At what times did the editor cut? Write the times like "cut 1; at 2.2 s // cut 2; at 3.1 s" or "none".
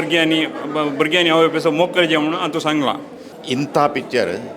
cut 1; at 3.3 s